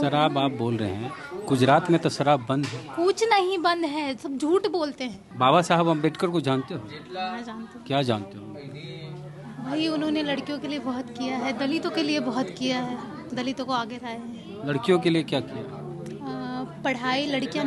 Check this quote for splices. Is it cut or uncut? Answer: cut